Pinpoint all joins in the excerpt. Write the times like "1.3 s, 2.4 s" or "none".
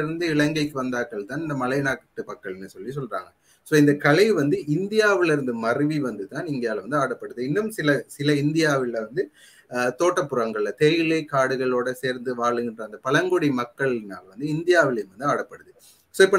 none